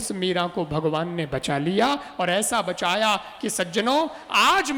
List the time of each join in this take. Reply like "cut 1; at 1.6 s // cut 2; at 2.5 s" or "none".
none